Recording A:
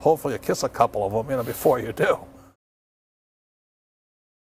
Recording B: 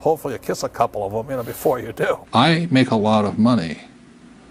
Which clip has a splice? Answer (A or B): B